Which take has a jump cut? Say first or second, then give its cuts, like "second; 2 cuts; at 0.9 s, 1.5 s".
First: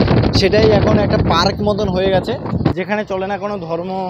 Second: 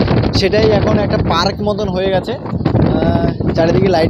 first; 1 cut; at 2.7 s